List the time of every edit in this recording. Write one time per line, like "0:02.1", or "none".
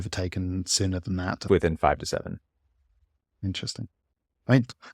0:01.5